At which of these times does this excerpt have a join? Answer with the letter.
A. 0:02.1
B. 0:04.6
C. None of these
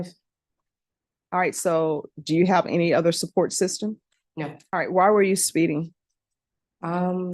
B